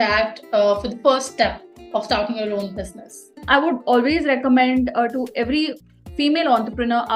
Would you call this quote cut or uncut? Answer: cut